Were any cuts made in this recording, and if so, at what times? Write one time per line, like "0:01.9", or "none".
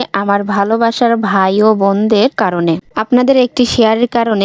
0:02.8

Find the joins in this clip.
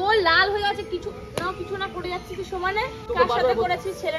0:03.0

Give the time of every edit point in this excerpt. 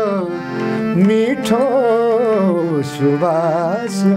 none

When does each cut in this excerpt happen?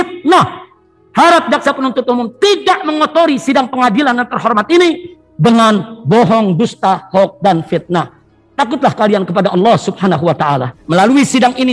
0:10.7

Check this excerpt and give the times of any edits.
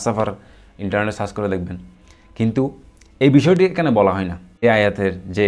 0:04.5

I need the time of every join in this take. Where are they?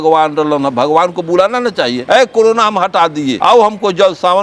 none

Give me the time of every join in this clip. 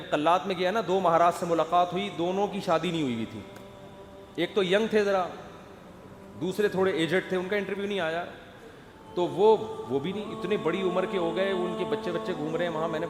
none

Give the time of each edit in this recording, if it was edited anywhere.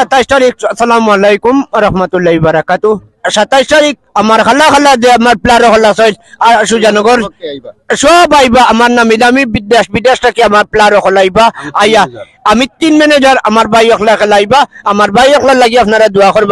none

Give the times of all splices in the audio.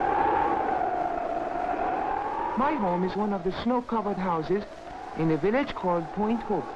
0:01.1

